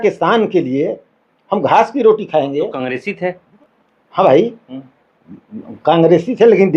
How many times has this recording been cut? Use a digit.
1